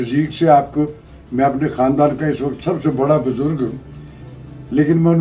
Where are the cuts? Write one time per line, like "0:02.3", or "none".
none